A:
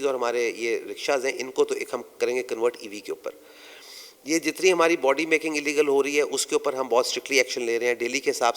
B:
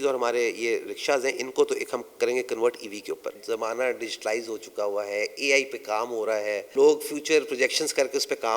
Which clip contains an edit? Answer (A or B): B